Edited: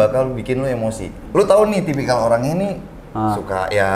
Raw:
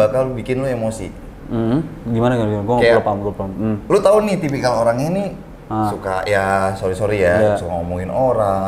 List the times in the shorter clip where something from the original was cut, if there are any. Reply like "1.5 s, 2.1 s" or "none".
1.2 s